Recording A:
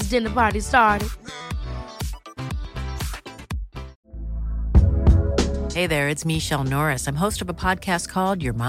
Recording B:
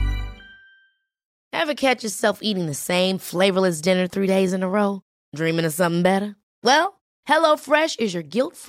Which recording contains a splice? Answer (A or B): A